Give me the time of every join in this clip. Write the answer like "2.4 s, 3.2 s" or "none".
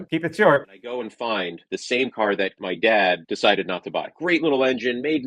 1.6 s, 4.1 s